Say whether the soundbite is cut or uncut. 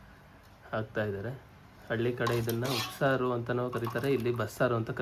uncut